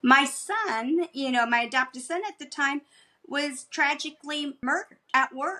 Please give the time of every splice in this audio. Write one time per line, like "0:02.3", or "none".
0:04.6